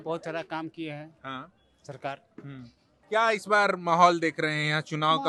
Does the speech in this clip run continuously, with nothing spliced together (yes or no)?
yes